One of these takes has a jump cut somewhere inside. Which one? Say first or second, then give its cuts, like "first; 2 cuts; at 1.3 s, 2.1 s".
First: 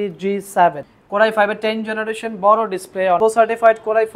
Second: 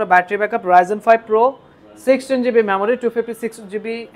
first; 2 cuts; at 0.9 s, 3.2 s